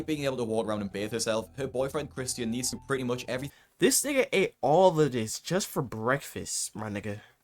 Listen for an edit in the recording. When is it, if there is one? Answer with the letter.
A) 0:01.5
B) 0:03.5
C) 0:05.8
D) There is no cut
B